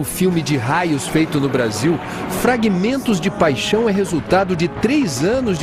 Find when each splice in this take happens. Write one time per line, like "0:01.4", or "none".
none